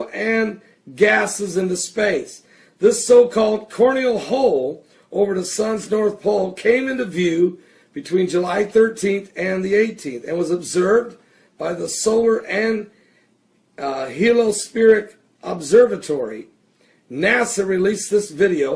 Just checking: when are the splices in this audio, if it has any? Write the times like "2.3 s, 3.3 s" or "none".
14.1 s